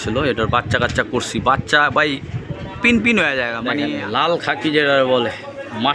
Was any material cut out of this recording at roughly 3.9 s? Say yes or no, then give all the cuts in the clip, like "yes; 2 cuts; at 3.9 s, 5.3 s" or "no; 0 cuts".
yes; 1 cut; at 3.9 s